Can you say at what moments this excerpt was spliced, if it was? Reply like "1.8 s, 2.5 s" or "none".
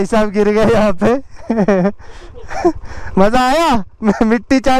none

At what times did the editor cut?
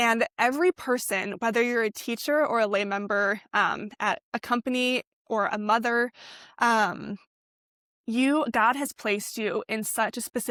none

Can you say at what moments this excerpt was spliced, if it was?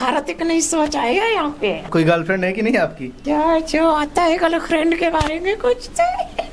1.9 s, 3.1 s

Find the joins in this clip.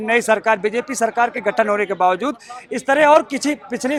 none

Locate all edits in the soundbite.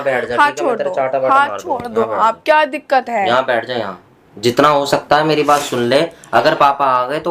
none

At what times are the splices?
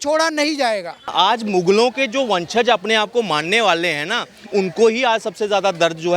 1.1 s

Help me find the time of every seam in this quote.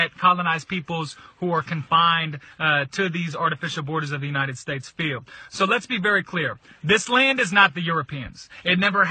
5.4 s

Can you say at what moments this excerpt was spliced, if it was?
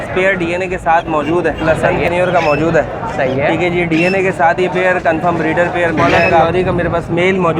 1.6 s, 6.4 s

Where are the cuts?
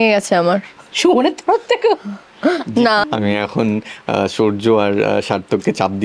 3.0 s

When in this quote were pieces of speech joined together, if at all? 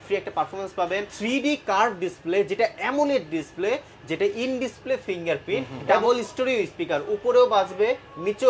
1.1 s, 6.0 s

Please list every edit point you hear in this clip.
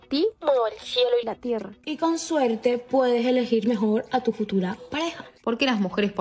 1.8 s, 5.3 s

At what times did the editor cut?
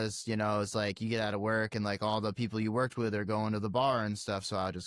none

